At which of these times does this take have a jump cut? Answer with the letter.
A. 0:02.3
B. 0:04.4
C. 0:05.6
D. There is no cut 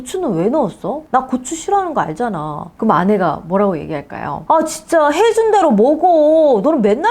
B